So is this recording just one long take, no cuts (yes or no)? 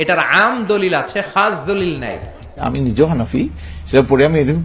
no